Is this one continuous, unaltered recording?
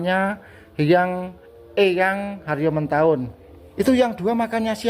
no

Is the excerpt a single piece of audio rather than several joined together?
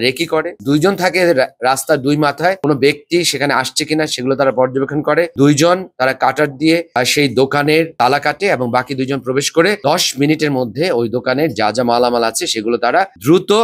yes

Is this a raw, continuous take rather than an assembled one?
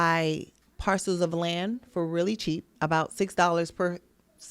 no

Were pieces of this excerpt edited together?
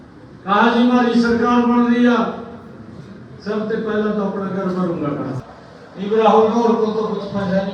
yes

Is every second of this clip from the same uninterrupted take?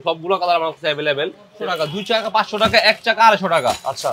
no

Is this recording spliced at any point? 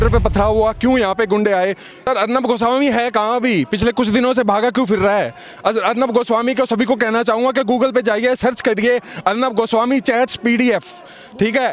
yes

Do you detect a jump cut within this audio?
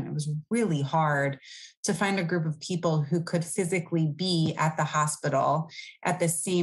no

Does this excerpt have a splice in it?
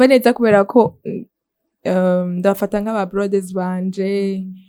no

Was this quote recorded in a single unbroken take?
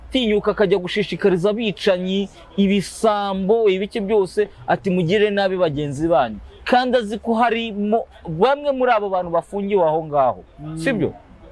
yes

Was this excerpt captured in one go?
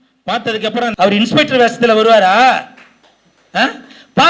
no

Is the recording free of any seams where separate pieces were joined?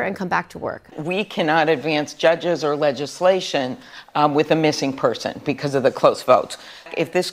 no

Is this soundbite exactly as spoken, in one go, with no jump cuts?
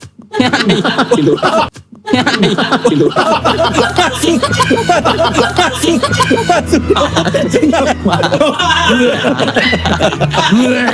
yes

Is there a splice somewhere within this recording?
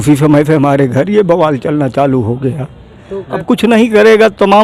yes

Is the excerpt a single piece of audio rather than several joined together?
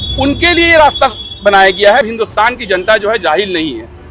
no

